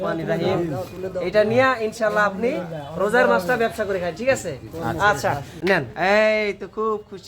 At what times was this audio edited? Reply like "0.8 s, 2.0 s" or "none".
5.5 s